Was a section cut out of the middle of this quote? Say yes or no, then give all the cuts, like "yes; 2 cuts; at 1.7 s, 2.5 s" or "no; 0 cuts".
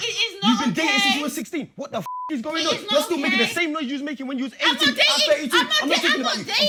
no; 0 cuts